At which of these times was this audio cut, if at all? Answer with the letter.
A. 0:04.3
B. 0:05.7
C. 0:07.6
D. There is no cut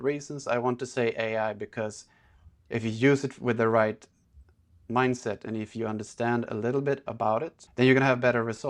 C